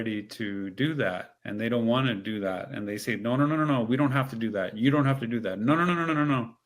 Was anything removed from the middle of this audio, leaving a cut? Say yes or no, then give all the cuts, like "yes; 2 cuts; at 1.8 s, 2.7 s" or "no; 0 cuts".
yes; 1 cut; at 1.3 s